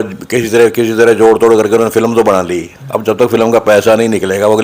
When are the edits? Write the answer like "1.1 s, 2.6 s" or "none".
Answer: none